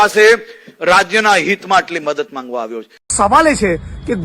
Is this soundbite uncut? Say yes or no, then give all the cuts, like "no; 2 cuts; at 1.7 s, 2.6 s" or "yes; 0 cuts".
no; 1 cut; at 3.1 s